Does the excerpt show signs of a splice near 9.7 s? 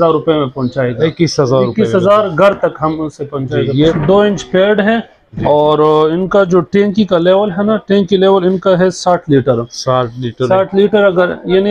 no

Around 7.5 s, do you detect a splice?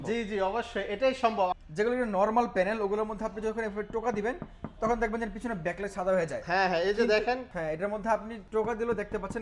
yes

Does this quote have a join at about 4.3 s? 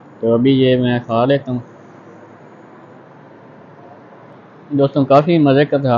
yes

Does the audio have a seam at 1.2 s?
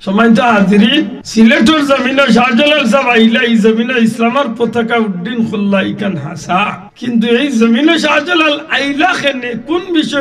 yes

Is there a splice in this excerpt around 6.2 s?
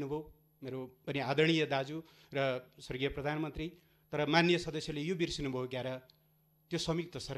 no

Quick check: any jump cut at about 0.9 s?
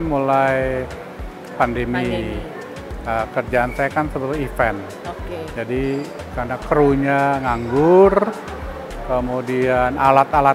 no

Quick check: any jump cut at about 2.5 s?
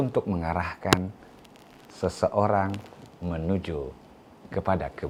no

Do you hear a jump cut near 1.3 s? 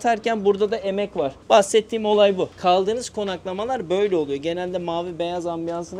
no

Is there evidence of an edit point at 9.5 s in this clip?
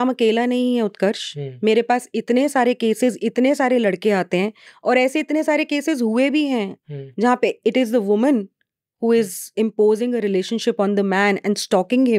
no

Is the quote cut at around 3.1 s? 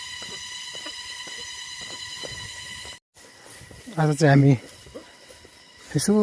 yes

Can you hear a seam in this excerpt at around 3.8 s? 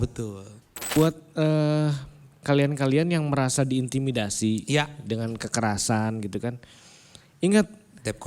no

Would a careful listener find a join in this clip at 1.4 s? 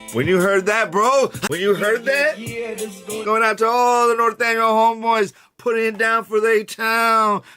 yes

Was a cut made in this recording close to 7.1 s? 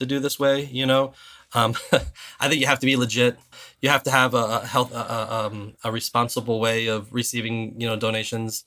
no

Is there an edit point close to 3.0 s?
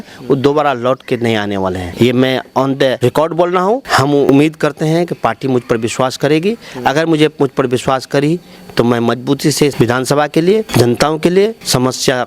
yes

